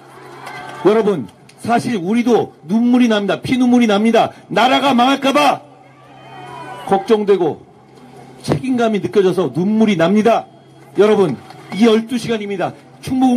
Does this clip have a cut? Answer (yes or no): yes